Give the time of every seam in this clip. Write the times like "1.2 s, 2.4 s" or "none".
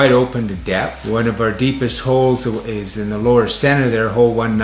1.0 s